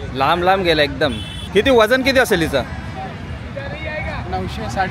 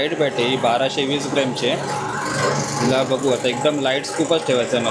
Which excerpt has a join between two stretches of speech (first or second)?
first